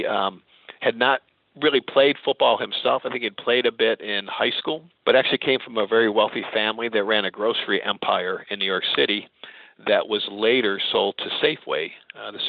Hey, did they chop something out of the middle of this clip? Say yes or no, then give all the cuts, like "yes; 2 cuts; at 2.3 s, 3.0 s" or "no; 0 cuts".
yes; 1 cut; at 4.9 s